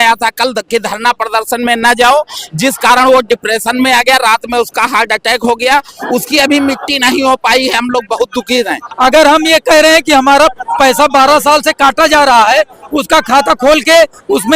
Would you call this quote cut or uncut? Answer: cut